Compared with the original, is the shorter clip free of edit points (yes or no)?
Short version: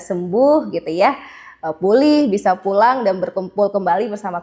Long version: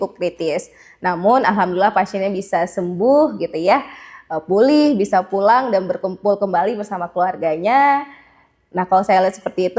yes